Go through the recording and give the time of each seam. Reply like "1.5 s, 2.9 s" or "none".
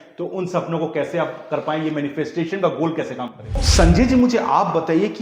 3.6 s